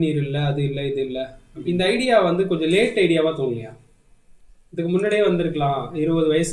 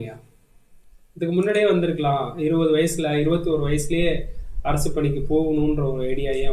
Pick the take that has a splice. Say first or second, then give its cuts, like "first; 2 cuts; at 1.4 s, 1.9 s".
first; 1 cut; at 1.4 s